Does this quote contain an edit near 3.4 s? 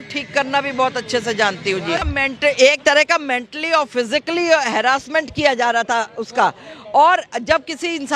no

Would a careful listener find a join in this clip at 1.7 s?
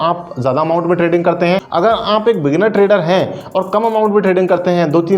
yes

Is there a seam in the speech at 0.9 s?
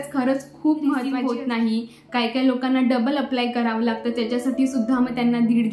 yes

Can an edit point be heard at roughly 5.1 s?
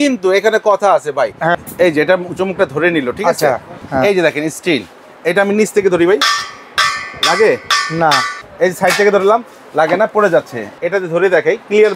no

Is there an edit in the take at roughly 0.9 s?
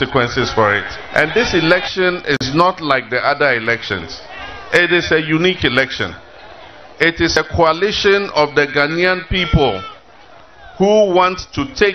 yes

